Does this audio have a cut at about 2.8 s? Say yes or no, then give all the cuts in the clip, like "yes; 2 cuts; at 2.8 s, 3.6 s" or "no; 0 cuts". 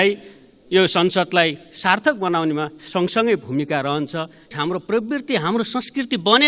no; 1 cut; at 4.5 s